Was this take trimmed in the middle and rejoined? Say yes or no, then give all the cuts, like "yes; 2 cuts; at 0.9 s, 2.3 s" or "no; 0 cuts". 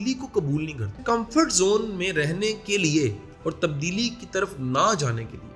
yes; 2 cuts; at 1.0 s, 3.3 s